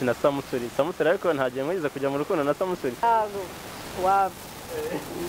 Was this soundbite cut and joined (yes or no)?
yes